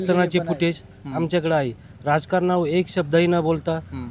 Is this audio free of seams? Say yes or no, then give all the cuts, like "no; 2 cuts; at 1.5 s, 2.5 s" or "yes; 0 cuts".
yes; 0 cuts